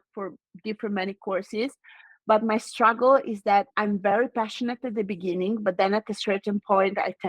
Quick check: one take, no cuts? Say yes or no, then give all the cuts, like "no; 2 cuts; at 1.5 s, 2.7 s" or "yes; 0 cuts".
yes; 0 cuts